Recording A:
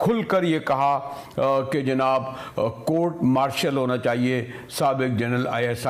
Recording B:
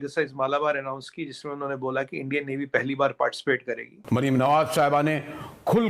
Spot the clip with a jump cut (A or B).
B